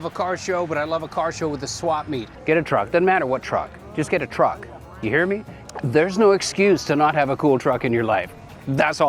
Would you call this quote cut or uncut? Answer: cut